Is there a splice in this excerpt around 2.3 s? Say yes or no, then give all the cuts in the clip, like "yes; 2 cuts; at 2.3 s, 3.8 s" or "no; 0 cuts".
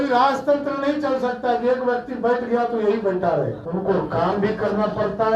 no; 1 cut; at 3.6 s